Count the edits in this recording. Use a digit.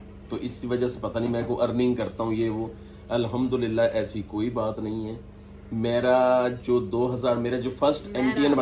0